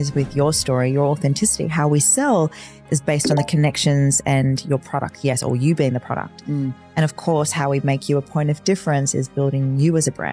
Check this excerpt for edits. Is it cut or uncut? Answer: uncut